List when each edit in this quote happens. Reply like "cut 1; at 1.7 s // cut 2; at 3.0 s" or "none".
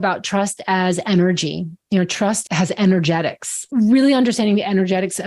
cut 1; at 2.4 s // cut 2; at 3.6 s

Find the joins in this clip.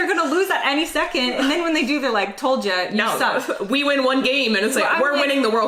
none

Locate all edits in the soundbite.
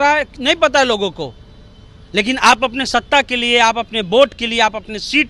none

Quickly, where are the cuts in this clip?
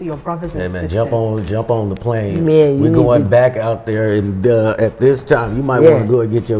none

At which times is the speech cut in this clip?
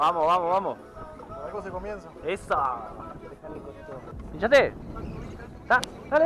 cut 1; at 4.1 s

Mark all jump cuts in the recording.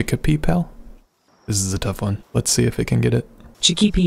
cut 1; at 2.2 s

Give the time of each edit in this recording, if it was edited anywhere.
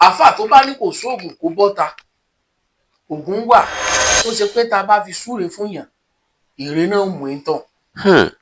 cut 1; at 4.0 s

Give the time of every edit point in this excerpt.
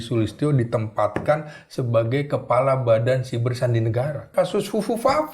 cut 1; at 4.2 s

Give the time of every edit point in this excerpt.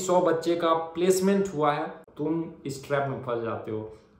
cut 1; at 2.0 s

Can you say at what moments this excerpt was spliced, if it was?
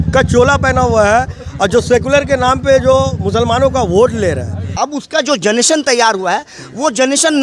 cut 1; at 4.8 s

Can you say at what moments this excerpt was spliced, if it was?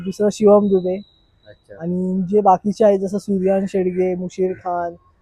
none

